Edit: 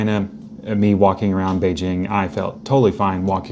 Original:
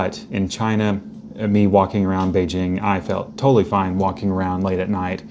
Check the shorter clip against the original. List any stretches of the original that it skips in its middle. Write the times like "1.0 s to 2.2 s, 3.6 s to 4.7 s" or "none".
none